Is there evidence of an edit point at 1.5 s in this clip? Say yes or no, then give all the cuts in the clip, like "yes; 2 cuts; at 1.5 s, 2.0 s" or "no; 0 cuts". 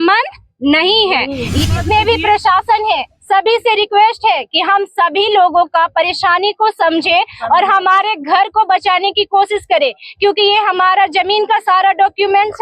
yes; 1 cut; at 1.5 s